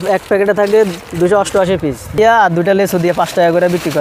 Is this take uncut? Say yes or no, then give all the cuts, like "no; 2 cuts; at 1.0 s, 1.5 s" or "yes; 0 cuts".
no; 1 cut; at 2.2 s